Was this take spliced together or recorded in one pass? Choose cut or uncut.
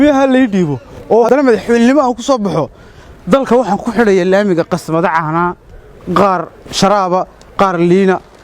cut